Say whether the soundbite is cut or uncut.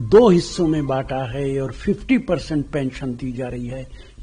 uncut